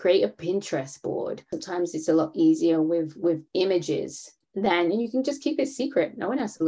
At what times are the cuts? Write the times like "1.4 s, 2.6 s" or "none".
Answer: 1.6 s